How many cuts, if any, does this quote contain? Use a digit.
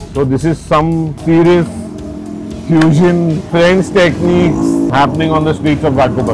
3